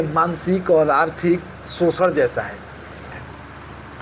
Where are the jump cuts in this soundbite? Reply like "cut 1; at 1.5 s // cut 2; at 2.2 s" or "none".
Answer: cut 1; at 3.0 s